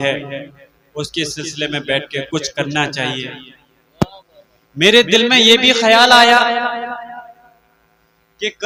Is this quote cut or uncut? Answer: uncut